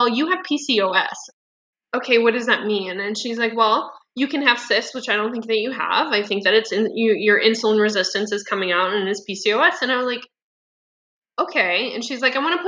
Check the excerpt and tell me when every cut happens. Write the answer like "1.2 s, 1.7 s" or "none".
1.2 s